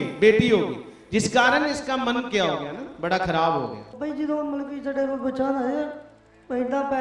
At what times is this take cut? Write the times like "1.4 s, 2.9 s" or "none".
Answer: 4.0 s